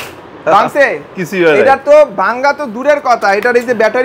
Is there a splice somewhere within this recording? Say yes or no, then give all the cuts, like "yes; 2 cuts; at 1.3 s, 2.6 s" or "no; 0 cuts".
no; 0 cuts